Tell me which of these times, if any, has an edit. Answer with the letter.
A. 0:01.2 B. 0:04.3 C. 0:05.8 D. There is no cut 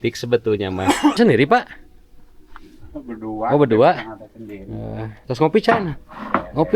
A